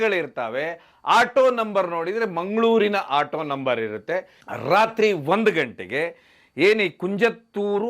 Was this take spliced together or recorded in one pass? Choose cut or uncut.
cut